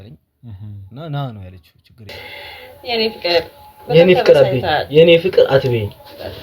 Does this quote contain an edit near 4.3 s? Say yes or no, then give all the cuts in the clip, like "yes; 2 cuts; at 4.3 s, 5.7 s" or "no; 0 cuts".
no; 1 cut; at 2.1 s